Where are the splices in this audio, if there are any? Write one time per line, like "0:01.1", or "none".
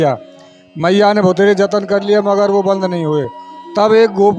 none